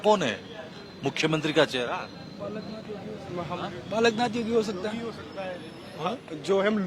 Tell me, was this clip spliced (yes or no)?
no